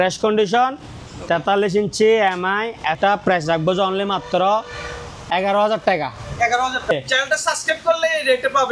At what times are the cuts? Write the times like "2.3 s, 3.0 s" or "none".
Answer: 3.0 s, 6.9 s